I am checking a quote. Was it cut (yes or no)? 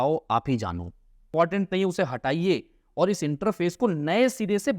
yes